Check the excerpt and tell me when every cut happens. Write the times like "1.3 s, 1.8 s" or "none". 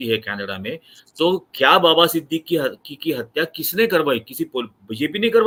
none